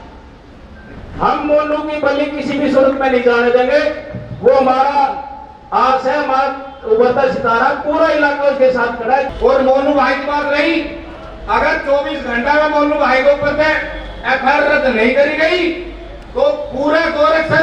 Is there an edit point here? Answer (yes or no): yes